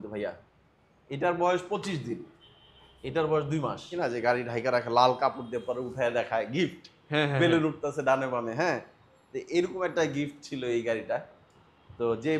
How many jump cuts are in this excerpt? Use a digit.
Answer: 1